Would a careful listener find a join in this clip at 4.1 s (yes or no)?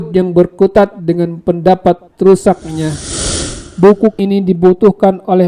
yes